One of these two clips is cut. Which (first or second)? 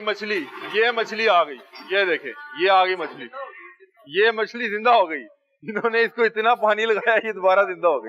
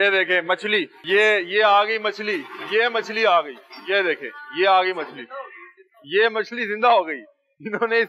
second